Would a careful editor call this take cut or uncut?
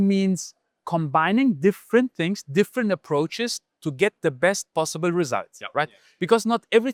uncut